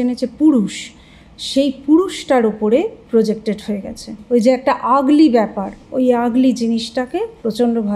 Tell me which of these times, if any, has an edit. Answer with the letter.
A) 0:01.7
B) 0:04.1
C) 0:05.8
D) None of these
B